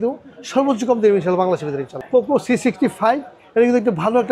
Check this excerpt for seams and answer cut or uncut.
cut